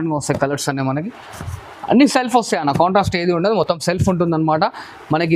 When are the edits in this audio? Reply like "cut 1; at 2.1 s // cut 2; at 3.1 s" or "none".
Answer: none